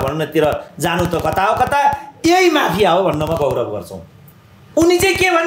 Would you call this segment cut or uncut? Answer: uncut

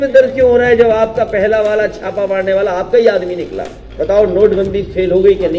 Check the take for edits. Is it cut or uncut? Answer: cut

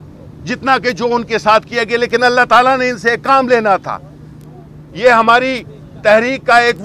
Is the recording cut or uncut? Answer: uncut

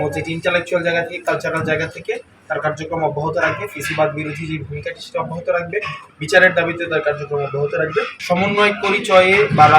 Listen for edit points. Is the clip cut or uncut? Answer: cut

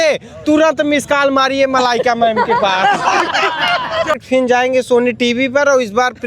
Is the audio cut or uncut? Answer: cut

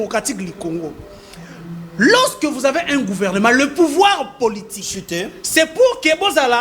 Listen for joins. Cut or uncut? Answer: uncut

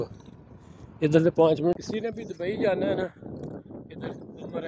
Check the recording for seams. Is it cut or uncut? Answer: cut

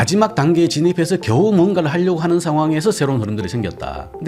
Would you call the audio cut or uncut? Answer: uncut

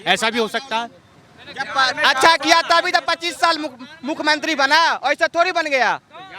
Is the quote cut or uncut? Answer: uncut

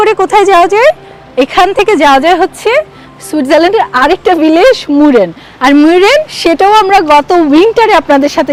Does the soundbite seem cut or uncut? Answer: uncut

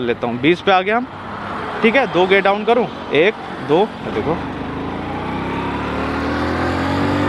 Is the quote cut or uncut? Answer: uncut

